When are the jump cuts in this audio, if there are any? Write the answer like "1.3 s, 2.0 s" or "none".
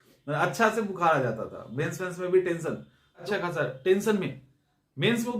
3.2 s